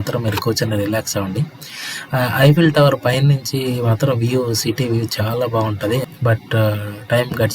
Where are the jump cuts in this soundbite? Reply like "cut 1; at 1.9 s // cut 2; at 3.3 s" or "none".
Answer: cut 1; at 6.0 s